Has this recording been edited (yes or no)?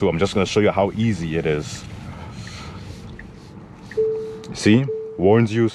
no